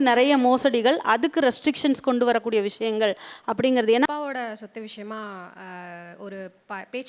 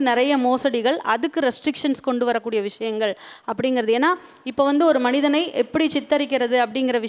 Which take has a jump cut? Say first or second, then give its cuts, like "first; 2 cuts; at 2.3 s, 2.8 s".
first; 1 cut; at 4.1 s